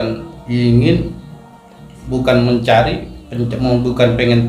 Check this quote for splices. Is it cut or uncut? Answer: uncut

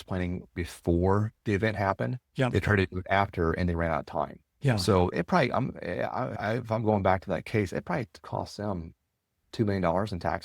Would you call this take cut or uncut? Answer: cut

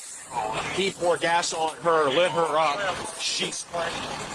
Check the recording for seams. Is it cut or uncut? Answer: uncut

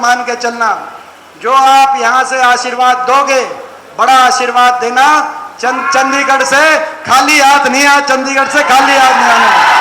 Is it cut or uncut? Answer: uncut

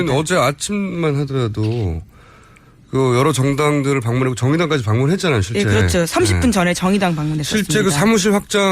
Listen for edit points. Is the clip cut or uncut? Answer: cut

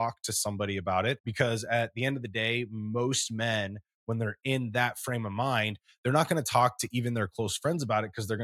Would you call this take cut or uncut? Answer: cut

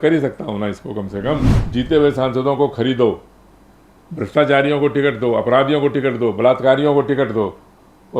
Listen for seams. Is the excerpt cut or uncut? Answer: cut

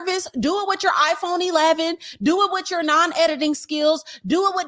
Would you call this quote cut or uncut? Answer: uncut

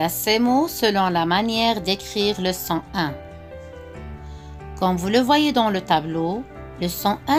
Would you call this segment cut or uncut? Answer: uncut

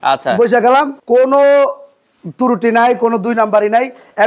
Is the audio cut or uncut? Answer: cut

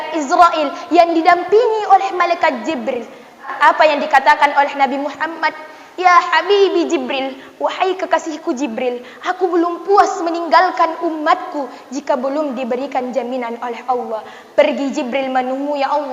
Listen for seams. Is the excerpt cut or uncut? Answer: cut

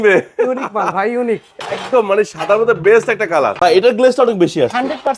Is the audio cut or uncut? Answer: cut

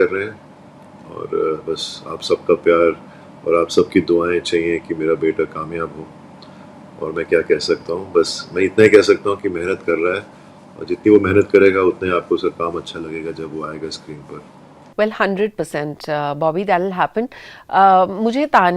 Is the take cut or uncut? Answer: uncut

